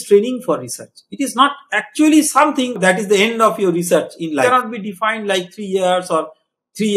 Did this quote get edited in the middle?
yes; 1 cut; at 4.4 s

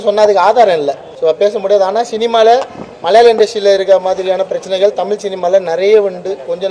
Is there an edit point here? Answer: yes; 1 cut; at 1.0 s

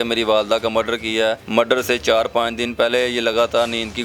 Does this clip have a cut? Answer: yes; 1 cut; at 1.4 s

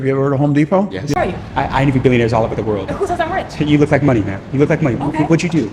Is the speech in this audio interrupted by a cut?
yes; 1 cut; at 1.1 s

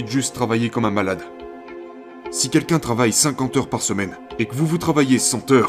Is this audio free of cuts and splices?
no; 2 cuts; at 1.8 s, 4.2 s

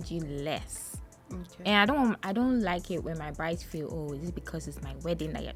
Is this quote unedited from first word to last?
yes; 0 cuts

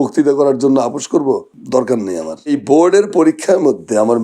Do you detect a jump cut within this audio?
yes; 2 cuts; at 1.5 s, 2.5 s

